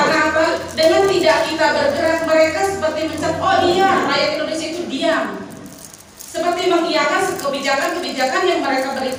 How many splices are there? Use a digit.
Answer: 0